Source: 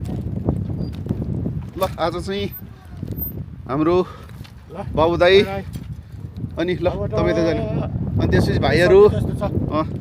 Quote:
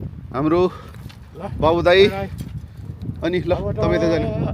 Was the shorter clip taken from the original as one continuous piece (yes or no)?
yes